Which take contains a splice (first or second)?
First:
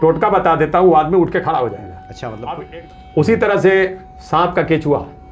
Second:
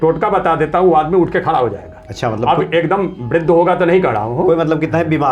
first